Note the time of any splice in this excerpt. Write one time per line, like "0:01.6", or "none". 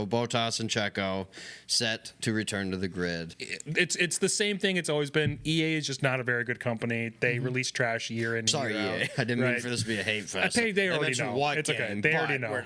0:03.3